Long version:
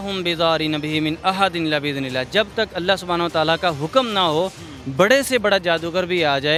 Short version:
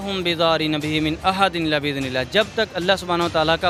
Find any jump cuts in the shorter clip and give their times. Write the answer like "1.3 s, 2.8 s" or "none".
none